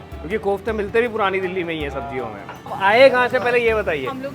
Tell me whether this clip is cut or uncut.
cut